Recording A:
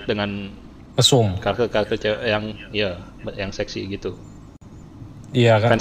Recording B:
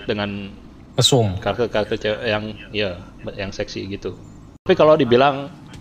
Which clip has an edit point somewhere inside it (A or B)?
B